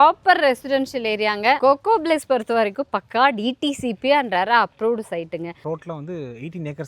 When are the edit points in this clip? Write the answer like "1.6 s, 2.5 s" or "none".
1.6 s, 5.6 s